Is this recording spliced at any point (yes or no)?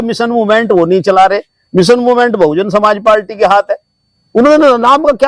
no